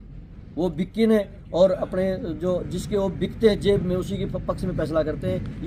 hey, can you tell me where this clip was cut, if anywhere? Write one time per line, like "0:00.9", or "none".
none